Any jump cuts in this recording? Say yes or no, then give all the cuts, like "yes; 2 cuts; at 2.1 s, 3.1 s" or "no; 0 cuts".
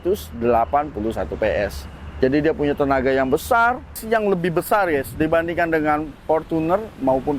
yes; 1 cut; at 4.0 s